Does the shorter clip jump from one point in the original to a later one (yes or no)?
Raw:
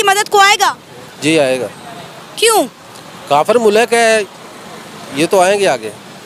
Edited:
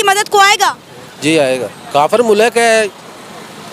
yes